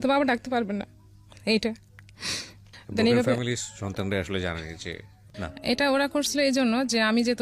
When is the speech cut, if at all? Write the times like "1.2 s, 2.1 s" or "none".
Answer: 5.5 s